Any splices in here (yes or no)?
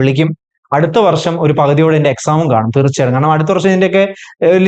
no